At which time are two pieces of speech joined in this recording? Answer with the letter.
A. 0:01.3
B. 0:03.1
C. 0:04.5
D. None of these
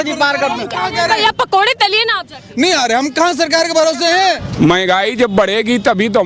C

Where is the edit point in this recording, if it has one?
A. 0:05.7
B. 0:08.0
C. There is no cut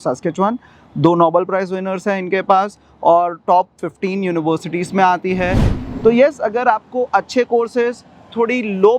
A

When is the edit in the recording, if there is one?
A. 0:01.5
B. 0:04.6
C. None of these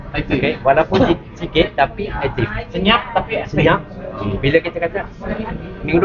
C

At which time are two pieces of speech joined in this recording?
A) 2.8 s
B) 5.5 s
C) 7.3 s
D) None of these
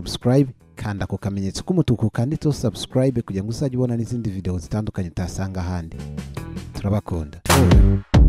D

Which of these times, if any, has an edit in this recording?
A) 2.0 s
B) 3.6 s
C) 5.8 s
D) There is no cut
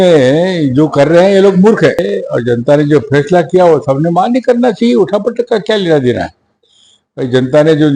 A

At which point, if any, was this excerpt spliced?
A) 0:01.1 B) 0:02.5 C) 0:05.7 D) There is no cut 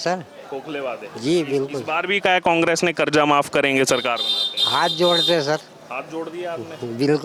D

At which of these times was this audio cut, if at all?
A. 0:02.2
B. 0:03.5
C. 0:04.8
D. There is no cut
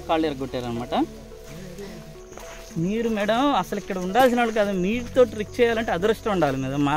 A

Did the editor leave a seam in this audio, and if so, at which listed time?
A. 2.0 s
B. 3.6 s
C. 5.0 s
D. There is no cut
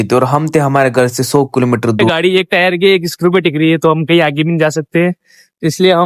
A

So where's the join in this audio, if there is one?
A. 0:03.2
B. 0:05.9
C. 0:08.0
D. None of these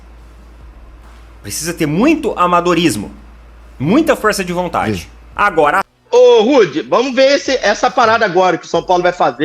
B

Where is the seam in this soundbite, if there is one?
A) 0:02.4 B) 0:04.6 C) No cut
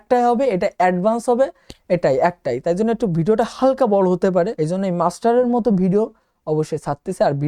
B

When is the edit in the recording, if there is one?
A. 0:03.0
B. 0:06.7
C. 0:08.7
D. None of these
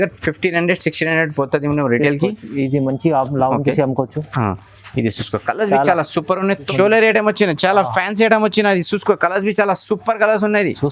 B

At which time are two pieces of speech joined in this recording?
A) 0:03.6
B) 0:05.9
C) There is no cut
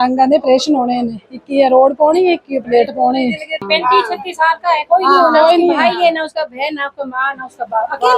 A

